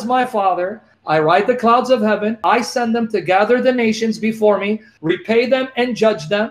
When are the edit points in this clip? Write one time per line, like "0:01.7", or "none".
0:00.9
0:02.4
0:04.9